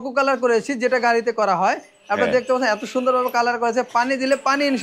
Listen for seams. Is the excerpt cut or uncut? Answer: uncut